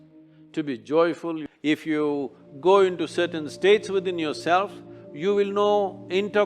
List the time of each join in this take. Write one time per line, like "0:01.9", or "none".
0:01.4

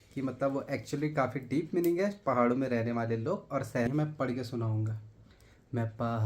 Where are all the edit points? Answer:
0:03.9

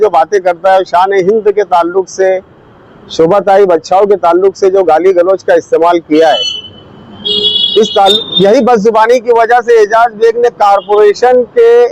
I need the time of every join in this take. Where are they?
0:08.1

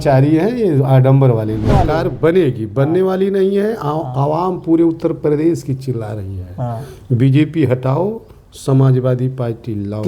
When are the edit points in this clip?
0:01.7

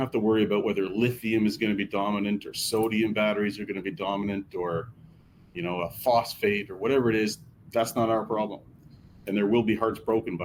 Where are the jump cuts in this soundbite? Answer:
none

